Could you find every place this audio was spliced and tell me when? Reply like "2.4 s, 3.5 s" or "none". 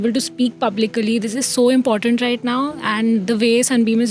none